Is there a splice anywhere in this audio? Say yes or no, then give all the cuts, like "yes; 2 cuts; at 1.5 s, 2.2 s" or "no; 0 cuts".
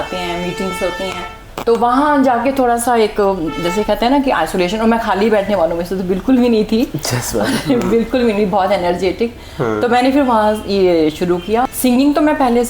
yes; 2 cuts; at 1.4 s, 11.6 s